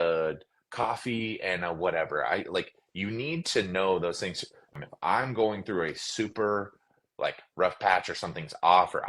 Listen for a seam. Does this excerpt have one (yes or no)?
yes